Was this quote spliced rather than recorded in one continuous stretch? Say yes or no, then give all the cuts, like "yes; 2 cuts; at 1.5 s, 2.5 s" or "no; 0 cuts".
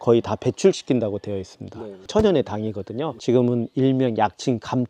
no; 0 cuts